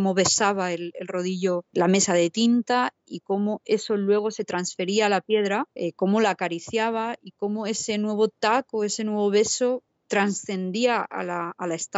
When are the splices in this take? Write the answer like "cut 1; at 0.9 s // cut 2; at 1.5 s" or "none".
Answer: cut 1; at 1.7 s // cut 2; at 5.7 s // cut 3; at 9.9 s